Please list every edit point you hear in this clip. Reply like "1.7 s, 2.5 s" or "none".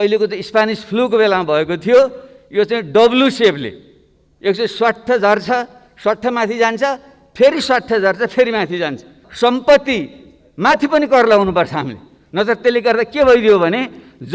9.2 s